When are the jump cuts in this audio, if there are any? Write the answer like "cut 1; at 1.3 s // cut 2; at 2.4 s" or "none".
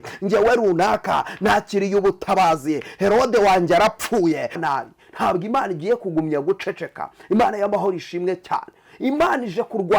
cut 1; at 4.6 s